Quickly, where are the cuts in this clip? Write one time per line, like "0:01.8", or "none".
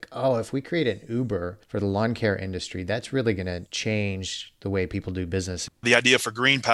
0:01.6
0:03.7
0:05.8